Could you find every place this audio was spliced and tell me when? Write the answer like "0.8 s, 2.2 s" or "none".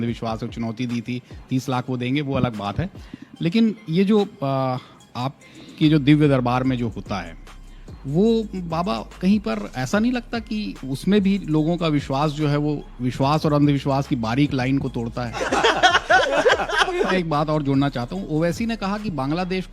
17.1 s